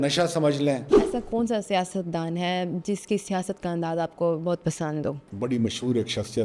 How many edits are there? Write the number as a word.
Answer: two